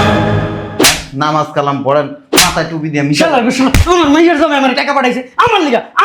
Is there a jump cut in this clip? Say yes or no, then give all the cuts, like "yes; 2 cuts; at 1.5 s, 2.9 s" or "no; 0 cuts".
no; 0 cuts